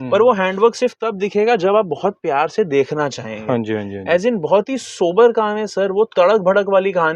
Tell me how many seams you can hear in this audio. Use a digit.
0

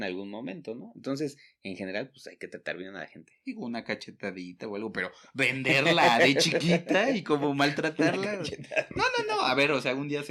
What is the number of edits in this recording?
0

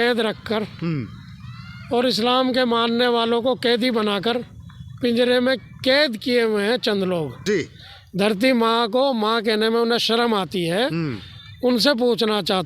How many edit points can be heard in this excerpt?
1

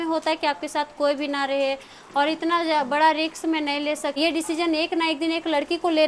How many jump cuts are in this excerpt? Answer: 1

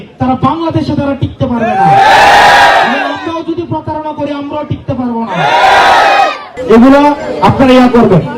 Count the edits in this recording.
1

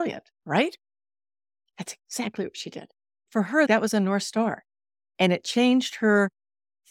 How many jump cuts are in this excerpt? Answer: 2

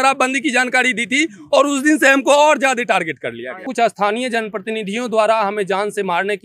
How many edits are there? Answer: 1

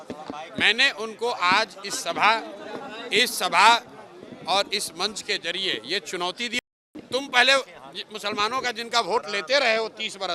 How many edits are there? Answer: 1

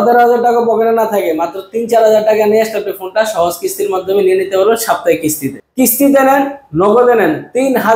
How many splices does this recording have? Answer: 1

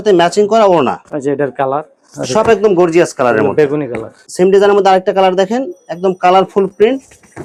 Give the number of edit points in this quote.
0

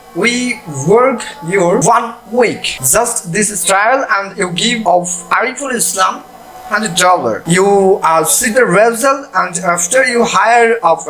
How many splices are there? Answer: 4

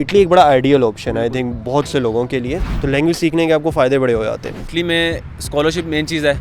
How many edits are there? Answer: 2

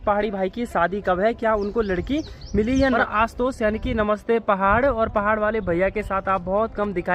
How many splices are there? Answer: 1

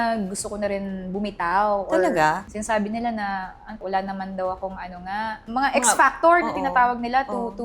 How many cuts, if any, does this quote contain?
2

